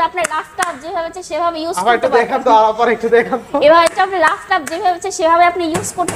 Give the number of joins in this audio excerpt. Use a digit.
0